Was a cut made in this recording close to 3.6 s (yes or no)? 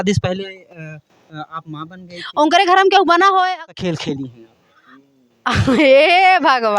yes